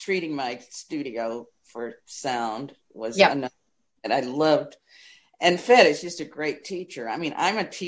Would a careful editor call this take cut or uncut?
uncut